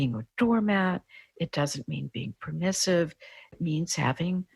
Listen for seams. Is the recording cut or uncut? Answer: cut